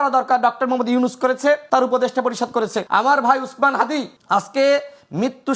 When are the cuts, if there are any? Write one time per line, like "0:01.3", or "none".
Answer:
0:01.6
0:02.8
0:04.2